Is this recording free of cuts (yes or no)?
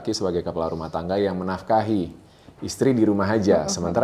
yes